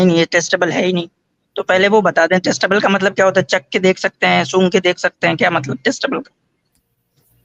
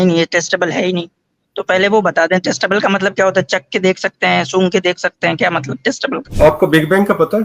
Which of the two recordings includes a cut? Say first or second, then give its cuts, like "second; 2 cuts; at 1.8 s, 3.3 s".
second; 1 cut; at 6.3 s